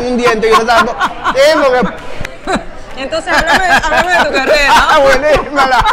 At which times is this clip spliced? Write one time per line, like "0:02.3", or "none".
0:02.1

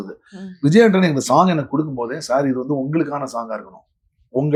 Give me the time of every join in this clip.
none

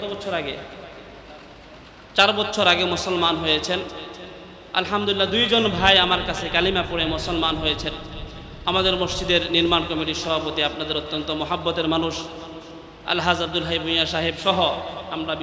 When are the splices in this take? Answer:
none

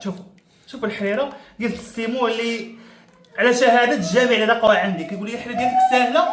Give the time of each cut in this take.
none

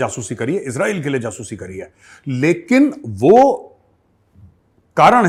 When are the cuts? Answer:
none

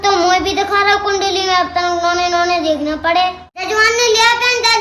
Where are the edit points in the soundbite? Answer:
0:03.5

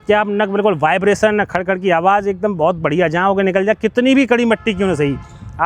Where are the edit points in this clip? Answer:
none

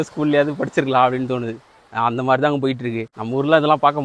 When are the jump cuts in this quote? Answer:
0:03.1

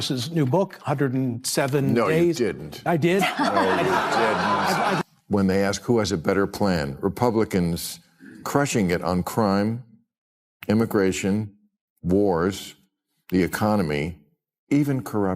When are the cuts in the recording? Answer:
0:04.8

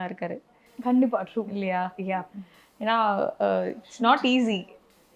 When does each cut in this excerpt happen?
none

